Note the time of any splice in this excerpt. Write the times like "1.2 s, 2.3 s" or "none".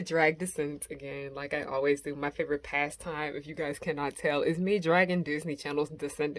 none